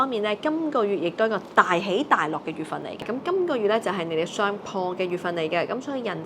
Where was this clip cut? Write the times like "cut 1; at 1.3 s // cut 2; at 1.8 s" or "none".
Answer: cut 1; at 3.0 s